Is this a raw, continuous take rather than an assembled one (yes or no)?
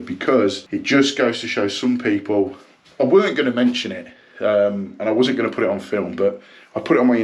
yes